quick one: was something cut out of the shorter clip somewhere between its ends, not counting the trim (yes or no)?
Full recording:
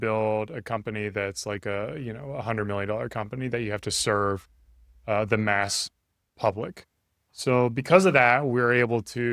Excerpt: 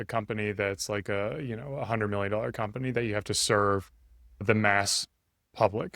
yes